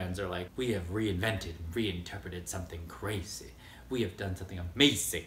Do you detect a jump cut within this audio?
no; 0 cuts

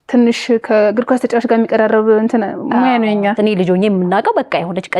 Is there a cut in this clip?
yes; 1 cut; at 3.4 s

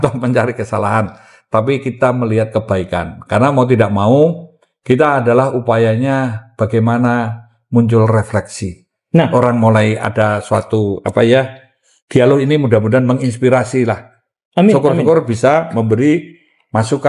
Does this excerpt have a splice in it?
no; 0 cuts

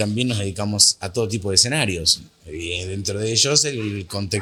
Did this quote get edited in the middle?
no; 0 cuts

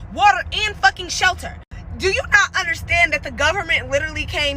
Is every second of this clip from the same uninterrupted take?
no; 1 cut; at 2.3 s

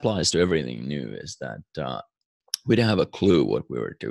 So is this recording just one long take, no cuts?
no; 1 cut; at 2.1 s

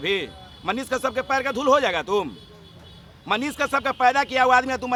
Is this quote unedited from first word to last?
yes; 0 cuts

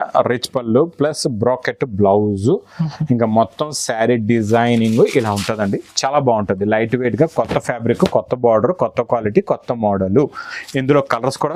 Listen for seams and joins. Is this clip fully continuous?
yes; 0 cuts

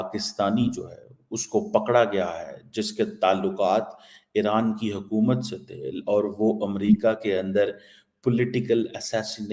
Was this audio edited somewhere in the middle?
no; 0 cuts

